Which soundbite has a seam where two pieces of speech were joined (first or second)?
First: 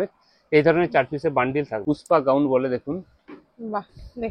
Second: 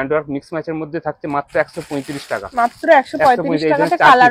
first